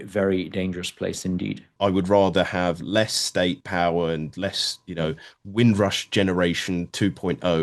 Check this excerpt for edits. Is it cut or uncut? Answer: cut